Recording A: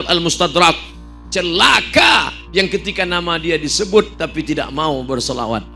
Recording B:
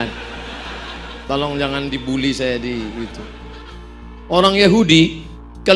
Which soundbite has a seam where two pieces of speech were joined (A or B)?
B